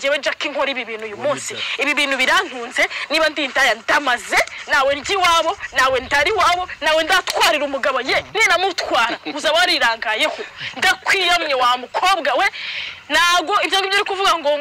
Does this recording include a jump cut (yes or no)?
no